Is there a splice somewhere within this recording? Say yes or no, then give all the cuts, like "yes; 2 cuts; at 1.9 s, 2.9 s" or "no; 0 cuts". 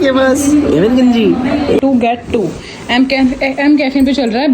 yes; 1 cut; at 1.8 s